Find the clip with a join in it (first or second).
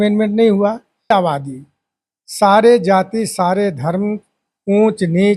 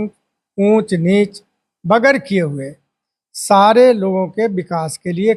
first